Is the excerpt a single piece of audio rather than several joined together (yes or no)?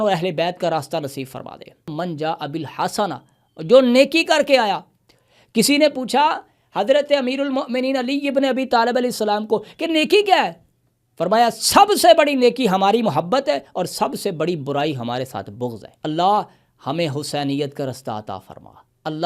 no